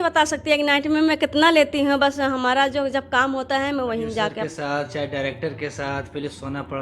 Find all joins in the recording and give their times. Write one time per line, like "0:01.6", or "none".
0:04.5